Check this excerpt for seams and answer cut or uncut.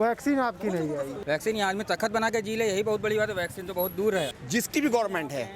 cut